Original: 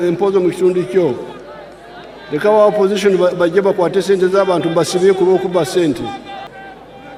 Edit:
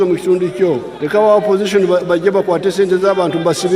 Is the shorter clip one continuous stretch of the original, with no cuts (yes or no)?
no